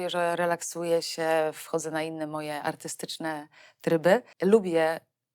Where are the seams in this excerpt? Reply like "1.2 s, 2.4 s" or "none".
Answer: 4.3 s